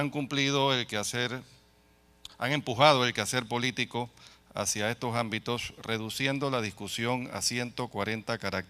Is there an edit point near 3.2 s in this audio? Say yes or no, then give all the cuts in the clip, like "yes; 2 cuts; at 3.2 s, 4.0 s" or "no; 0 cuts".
yes; 1 cut; at 3.2 s